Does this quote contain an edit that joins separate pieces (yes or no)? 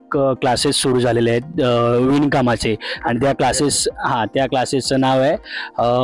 no